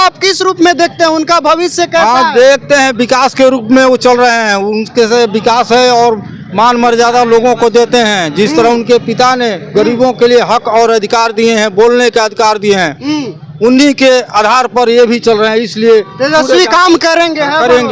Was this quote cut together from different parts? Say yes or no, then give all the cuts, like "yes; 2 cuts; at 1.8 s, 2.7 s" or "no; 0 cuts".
no; 0 cuts